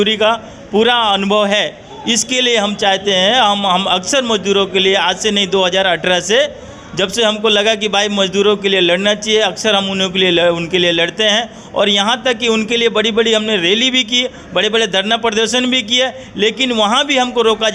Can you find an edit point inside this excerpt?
no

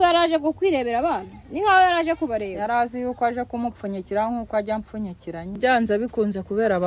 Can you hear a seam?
yes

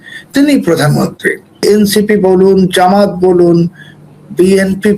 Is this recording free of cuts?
no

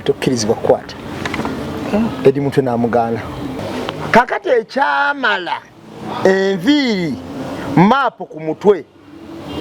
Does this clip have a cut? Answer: yes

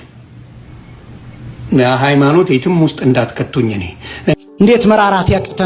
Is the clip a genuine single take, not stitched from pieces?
no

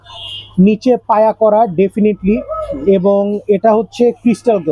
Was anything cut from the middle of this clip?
no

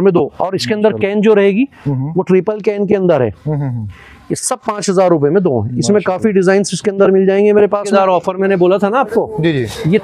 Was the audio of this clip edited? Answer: yes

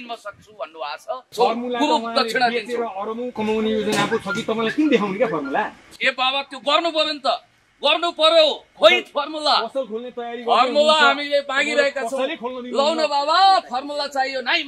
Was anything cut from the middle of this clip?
yes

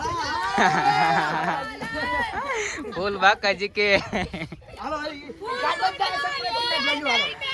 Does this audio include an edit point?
no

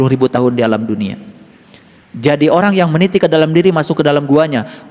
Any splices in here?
no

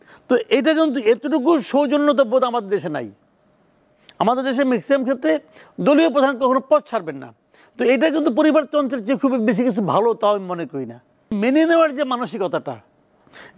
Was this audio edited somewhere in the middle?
yes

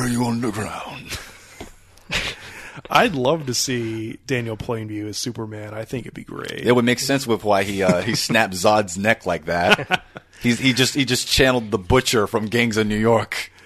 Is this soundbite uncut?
yes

